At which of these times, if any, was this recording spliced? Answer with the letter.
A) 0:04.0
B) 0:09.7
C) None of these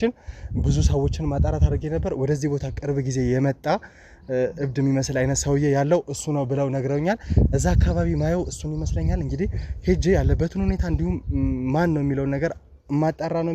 C